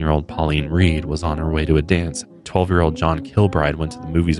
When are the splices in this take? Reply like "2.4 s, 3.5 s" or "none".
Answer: 2.4 s